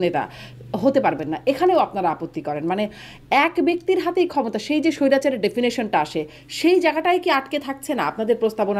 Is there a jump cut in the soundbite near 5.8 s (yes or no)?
no